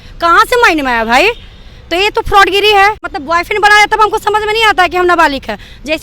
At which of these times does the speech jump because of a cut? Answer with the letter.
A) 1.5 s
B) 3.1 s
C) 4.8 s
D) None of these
B